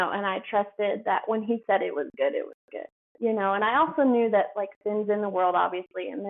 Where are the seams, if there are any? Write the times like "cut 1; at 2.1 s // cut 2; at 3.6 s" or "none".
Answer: none